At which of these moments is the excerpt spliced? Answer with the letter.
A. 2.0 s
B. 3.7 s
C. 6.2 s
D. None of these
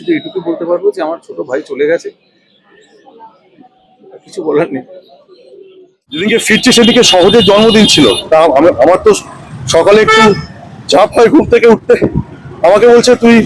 C